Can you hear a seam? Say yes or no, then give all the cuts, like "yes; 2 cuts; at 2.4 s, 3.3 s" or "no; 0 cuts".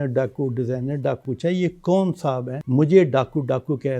yes; 2 cuts; at 1.2 s, 2.5 s